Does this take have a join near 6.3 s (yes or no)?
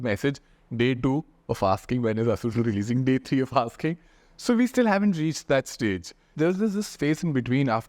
yes